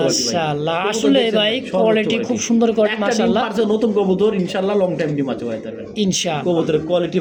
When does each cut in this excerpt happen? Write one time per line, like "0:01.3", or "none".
none